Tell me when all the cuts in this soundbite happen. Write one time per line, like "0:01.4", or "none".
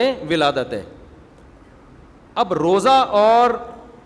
none